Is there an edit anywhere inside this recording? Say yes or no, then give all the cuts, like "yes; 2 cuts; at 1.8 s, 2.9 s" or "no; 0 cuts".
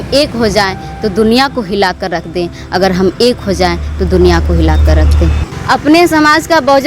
yes; 1 cut; at 5.4 s